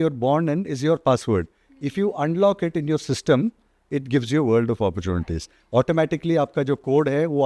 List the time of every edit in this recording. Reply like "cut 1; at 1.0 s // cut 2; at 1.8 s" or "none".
none